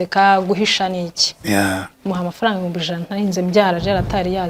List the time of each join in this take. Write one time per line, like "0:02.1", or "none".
none